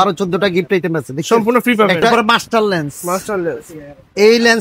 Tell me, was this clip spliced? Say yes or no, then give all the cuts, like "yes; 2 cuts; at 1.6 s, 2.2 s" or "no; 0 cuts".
yes; 1 cut; at 2.1 s